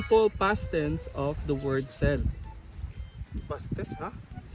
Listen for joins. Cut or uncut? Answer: uncut